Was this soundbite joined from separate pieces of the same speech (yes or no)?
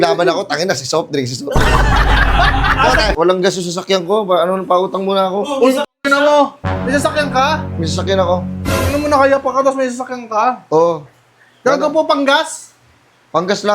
yes